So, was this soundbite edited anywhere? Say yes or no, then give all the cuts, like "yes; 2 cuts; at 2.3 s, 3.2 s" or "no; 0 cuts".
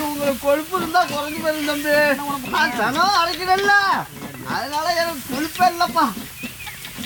no; 0 cuts